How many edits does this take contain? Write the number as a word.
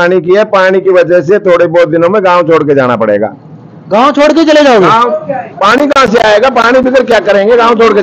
zero